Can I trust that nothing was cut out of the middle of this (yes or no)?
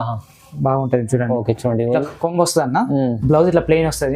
no